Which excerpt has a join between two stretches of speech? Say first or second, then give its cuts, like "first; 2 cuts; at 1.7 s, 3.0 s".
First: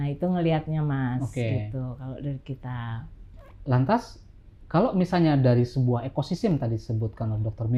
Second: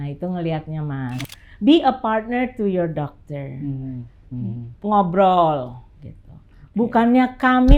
second; 1 cut; at 1.3 s